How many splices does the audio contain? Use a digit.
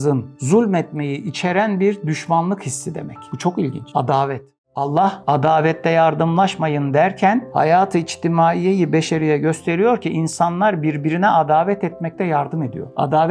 1